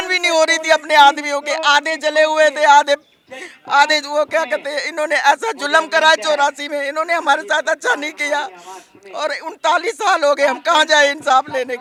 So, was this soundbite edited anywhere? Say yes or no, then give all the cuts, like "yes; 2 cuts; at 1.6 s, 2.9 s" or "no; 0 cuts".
no; 0 cuts